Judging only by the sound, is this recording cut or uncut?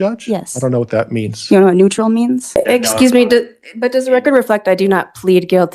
cut